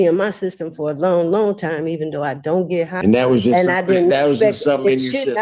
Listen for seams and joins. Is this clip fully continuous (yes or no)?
no